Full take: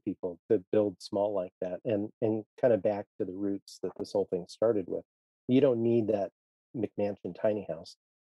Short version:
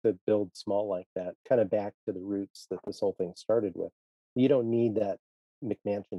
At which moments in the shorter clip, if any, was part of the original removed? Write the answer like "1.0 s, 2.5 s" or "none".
1.3 s